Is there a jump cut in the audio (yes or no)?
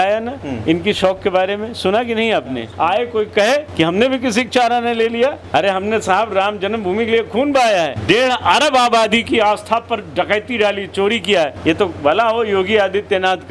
yes